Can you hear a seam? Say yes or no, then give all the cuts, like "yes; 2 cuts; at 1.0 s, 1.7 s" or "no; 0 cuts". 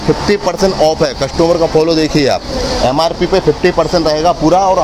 no; 0 cuts